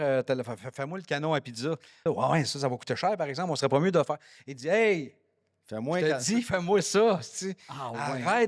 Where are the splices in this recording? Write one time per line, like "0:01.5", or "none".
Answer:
0:01.9